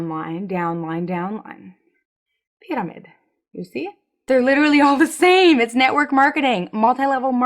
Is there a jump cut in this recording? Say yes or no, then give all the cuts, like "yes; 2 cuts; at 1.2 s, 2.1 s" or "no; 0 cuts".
yes; 1 cut; at 4.2 s